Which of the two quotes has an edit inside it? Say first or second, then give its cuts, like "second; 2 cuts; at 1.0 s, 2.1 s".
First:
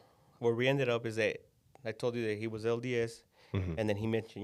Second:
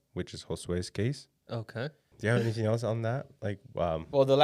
second; 1 cut; at 2.1 s